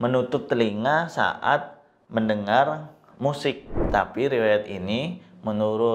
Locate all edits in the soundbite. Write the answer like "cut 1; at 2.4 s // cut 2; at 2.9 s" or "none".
cut 1; at 3.7 s